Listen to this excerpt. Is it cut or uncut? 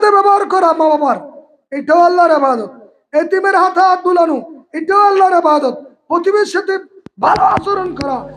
uncut